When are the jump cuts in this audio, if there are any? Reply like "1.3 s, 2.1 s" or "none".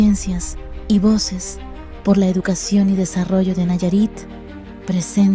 none